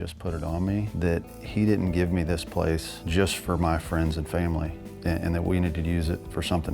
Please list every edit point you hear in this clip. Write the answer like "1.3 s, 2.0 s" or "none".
0.9 s, 3.0 s, 4.8 s